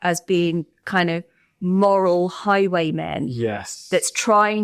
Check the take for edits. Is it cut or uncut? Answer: uncut